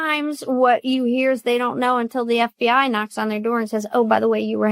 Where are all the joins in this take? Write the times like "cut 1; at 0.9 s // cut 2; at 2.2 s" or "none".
none